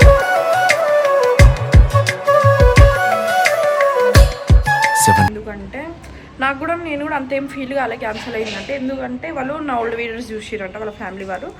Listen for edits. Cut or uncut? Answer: uncut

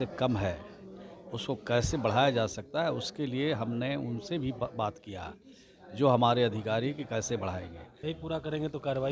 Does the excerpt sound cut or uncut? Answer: cut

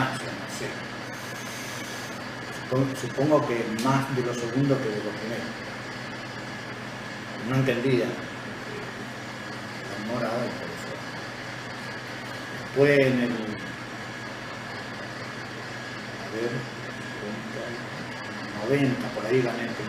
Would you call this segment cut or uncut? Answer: uncut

